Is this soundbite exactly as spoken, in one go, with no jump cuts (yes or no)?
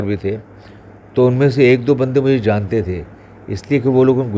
yes